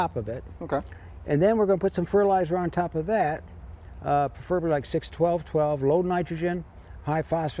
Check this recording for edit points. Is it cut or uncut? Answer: uncut